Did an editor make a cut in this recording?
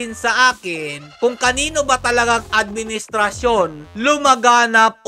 no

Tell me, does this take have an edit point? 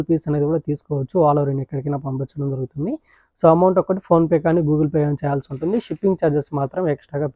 no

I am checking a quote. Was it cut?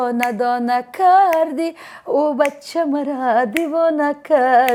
no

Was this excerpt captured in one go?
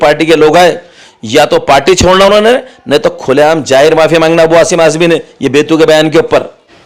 yes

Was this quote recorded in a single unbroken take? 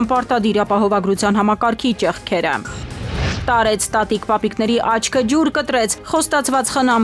no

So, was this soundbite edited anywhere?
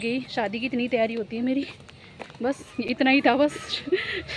no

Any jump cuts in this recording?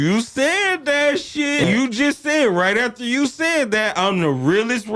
yes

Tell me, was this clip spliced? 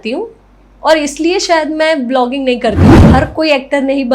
yes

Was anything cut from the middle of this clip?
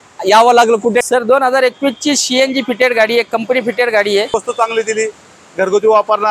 yes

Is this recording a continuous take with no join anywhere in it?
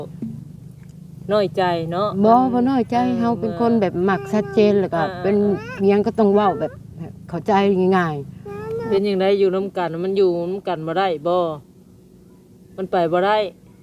no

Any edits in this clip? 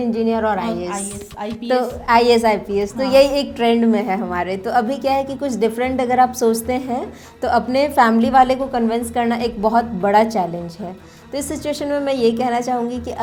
no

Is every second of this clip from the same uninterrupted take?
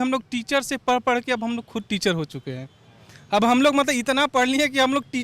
yes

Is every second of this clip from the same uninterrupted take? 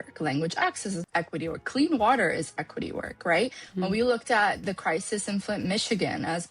no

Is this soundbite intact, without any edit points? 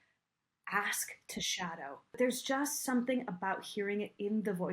no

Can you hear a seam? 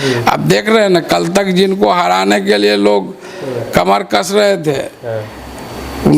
no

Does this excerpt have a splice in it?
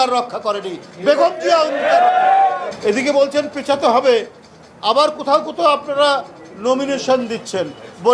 yes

